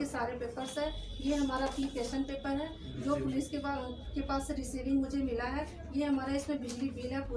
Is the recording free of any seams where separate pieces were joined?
yes; 0 cuts

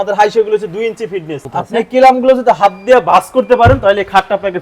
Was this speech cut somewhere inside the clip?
yes; 1 cut; at 1.4 s

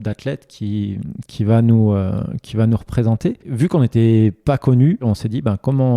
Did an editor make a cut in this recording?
yes; 2 cuts; at 3.5 s, 5.0 s

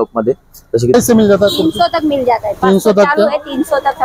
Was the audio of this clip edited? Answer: yes; 1 cut; at 0.9 s

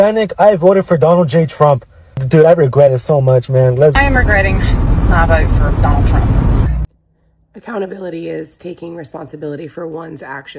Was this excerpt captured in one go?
no; 1 cut; at 6.8 s

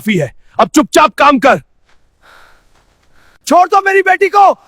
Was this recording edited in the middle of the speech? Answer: yes; 1 cut; at 3.3 s

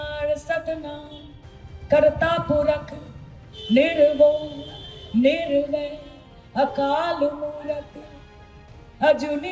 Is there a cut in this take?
no; 0 cuts

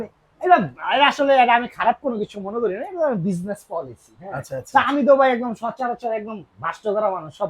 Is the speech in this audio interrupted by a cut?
no; 0 cuts

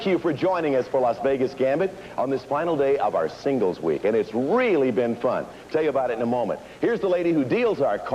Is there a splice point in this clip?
yes; 1 cut; at 3.8 s

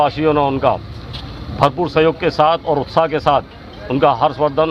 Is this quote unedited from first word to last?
yes; 0 cuts

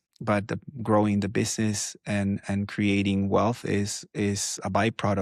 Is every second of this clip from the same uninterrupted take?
yes; 0 cuts

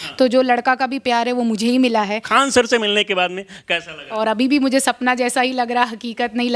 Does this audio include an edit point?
yes; 2 cuts; at 2.3 s, 4.0 s

